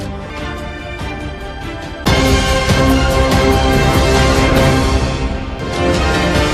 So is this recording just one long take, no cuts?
yes; 0 cuts

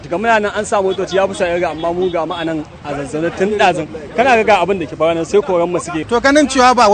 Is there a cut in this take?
no; 0 cuts

